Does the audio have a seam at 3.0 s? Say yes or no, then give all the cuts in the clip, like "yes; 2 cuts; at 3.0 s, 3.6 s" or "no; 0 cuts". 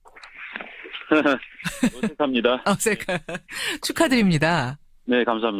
yes; 1 cut; at 3.0 s